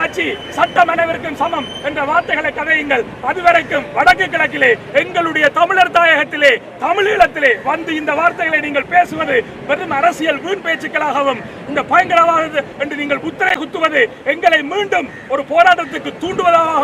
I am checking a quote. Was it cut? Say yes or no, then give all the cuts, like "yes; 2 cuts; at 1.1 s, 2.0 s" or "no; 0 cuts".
no; 0 cuts